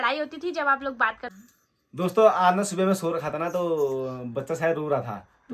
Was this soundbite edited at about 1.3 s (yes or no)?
yes